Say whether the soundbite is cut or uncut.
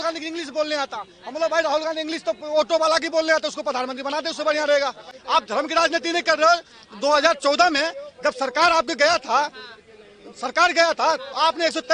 cut